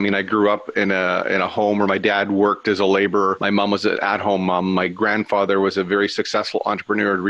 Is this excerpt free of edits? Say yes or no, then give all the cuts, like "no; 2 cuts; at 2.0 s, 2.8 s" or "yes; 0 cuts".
no; 1 cut; at 3.4 s